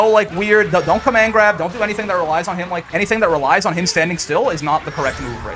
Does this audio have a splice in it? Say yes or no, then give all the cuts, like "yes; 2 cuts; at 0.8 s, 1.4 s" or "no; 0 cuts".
yes; 1 cut; at 2.9 s